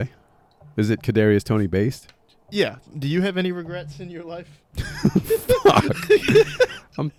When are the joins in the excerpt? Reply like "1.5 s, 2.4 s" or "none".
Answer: none

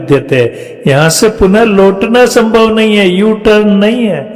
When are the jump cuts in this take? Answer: none

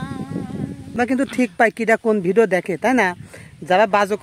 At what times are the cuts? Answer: 0.9 s

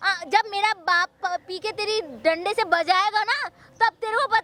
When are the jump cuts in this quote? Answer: none

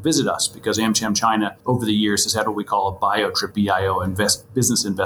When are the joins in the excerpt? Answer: 1.6 s, 3.5 s

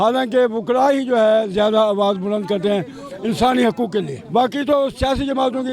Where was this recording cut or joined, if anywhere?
4.2 s

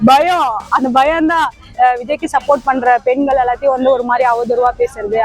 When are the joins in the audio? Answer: 1.7 s

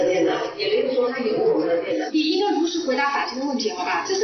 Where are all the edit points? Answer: 2.1 s

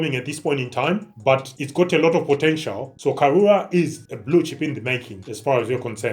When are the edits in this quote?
1.5 s, 2.9 s

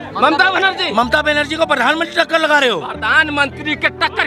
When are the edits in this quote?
2.9 s

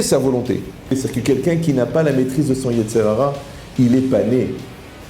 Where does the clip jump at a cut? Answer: 0.9 s

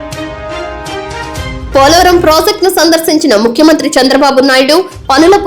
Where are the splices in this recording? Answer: 0.7 s, 1.6 s

